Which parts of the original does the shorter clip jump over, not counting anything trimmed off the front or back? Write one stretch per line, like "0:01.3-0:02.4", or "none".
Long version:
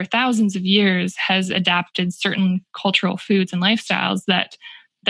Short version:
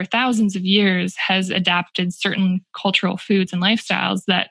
none